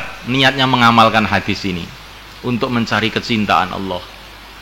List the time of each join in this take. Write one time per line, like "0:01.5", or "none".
none